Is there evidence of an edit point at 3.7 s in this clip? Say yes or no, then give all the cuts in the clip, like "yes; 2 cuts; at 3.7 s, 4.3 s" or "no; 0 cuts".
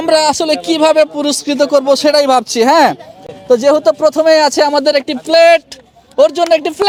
no; 0 cuts